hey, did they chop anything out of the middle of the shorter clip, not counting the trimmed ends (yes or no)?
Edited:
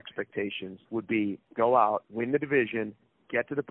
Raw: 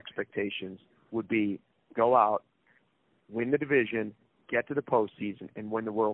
yes